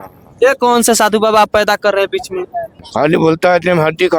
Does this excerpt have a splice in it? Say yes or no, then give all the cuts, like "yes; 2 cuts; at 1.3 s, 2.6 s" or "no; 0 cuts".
yes; 1 cut; at 2.8 s